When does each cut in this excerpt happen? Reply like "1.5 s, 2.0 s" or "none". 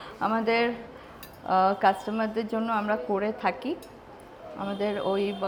none